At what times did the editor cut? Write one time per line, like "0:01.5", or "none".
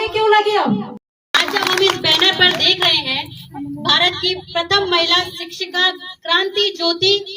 0:01.4